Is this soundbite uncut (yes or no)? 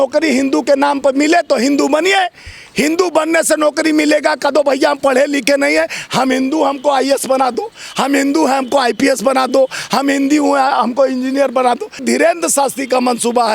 no